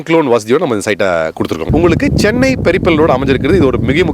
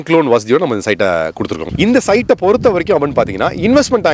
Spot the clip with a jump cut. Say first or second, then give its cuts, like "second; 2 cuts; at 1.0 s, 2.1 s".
first; 1 cut; at 1.6 s